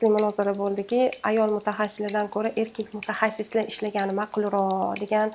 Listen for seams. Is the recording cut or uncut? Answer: uncut